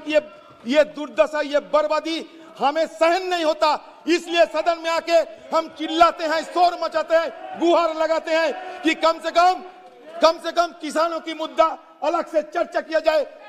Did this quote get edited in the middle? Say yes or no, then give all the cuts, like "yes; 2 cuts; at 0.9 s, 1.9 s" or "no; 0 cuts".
no; 0 cuts